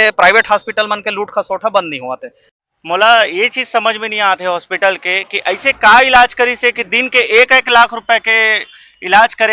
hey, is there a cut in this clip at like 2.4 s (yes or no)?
yes